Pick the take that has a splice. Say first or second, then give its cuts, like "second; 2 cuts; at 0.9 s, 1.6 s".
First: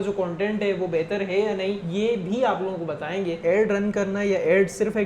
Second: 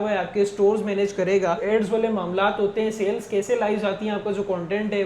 first; 2 cuts; at 1.8 s, 3.4 s